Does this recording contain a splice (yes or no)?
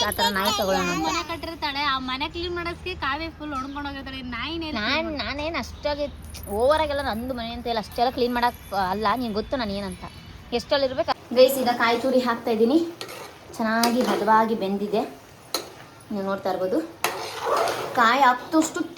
yes